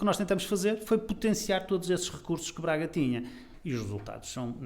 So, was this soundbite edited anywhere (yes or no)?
yes